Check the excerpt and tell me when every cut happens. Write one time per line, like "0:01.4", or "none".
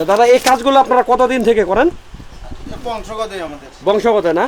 none